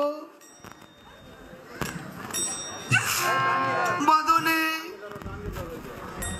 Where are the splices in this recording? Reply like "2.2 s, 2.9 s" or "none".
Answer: none